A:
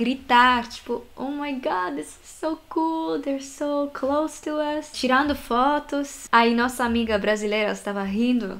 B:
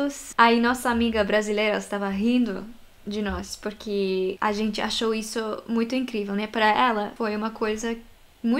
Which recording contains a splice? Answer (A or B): B